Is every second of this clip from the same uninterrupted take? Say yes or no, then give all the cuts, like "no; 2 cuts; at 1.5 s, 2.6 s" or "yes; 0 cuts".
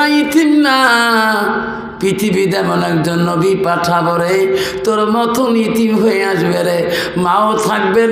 yes; 0 cuts